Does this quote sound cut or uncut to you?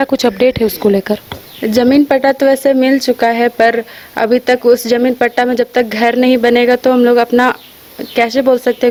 uncut